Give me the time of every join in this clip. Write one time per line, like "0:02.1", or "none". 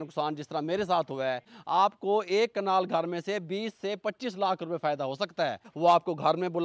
0:01.5
0:05.6